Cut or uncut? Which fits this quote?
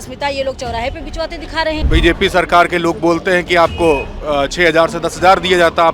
cut